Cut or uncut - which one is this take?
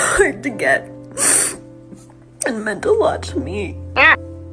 uncut